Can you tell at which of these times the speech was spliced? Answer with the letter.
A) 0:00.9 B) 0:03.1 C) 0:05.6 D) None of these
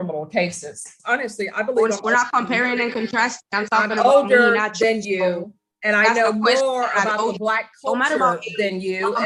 A